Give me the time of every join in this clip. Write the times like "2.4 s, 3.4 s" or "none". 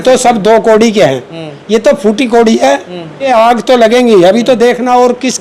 3.3 s